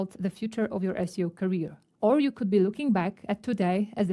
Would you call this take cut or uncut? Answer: uncut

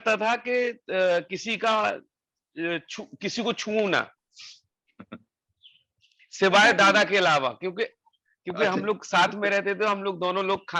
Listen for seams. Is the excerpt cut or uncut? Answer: uncut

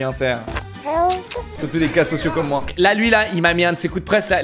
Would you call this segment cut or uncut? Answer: cut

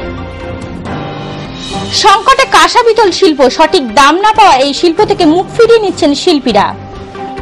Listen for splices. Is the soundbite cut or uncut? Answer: uncut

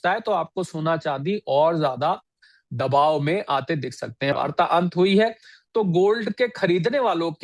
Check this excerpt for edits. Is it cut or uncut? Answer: cut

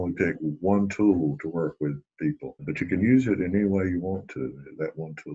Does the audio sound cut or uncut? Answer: cut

